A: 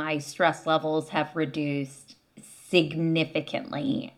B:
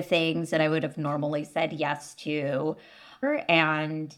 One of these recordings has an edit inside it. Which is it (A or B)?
B